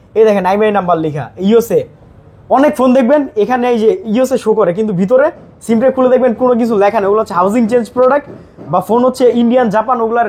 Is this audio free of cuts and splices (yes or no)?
yes